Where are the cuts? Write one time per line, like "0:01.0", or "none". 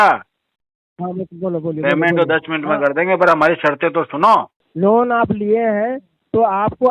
0:04.6